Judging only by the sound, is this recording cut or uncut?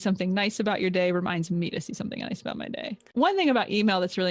cut